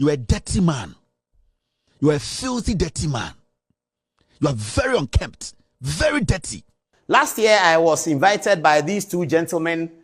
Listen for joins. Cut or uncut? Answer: cut